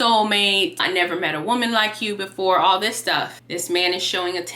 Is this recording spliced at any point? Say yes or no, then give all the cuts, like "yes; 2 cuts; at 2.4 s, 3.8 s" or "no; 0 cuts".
yes; 1 cut; at 3.3 s